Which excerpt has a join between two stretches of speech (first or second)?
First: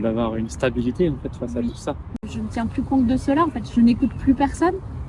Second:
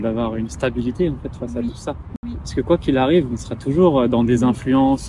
first